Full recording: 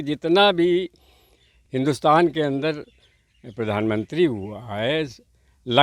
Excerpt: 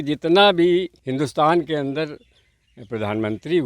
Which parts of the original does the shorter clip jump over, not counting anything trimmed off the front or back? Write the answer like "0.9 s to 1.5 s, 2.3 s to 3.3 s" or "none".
1.0 s to 1.7 s